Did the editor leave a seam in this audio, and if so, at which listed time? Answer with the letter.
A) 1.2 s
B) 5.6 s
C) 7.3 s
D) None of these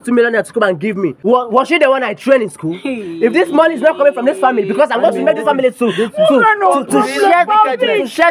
A